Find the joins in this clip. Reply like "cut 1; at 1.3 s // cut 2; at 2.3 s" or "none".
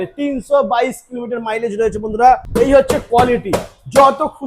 cut 1; at 2.5 s

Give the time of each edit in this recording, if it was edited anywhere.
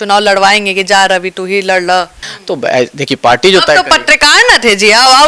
cut 1; at 2.2 s

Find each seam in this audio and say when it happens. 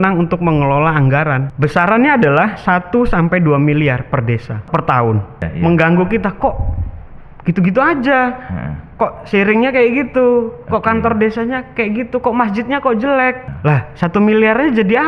cut 1; at 1.5 s // cut 2; at 4.6 s // cut 3; at 5.5 s // cut 4; at 13.5 s

